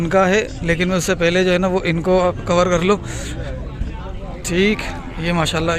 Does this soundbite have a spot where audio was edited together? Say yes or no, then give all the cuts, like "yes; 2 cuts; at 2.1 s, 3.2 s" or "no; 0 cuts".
no; 0 cuts